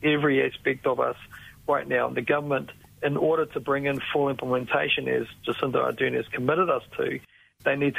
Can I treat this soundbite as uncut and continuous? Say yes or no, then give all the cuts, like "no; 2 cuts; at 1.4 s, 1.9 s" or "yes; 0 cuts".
yes; 0 cuts